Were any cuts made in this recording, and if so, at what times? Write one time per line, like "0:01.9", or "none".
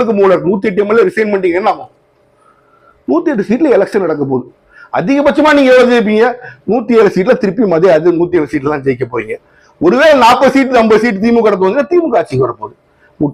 none